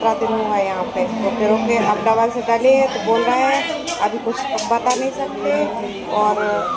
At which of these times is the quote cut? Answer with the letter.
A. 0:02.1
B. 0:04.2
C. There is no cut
C